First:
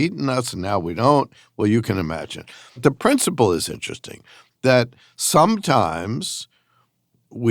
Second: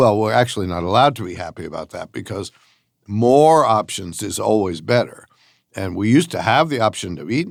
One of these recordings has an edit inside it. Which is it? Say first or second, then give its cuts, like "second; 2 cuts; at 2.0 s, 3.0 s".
first; 1 cut; at 2.8 s